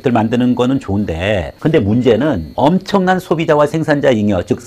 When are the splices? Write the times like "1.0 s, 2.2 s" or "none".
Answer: 2.5 s